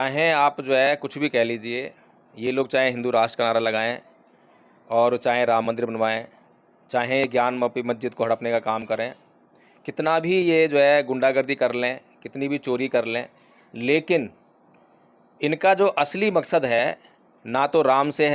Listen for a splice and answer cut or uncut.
uncut